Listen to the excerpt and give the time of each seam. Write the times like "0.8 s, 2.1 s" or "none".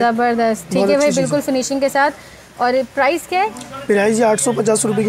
none